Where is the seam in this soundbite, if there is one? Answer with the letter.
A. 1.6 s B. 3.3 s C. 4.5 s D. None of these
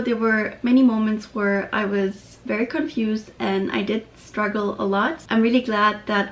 D